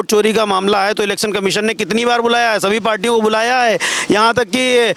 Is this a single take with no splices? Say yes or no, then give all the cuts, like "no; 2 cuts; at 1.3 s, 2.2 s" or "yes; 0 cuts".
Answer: yes; 0 cuts